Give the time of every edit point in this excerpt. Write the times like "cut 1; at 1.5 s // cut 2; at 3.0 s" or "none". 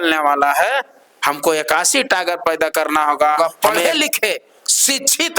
cut 1; at 3.4 s